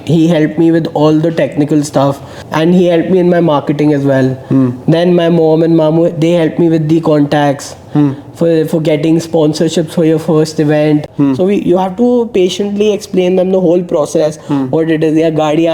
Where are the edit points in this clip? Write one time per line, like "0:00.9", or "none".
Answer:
0:02.3
0:11.1